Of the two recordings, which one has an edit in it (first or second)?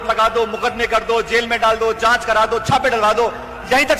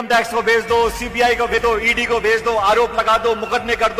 second